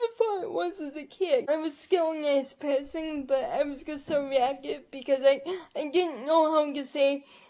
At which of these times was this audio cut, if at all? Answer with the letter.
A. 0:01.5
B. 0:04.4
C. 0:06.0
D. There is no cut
A